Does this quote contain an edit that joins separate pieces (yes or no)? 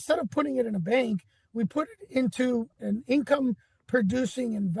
yes